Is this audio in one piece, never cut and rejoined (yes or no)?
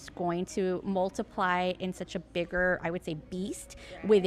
yes